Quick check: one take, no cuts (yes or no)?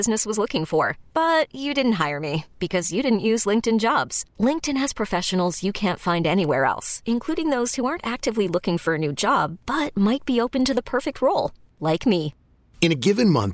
yes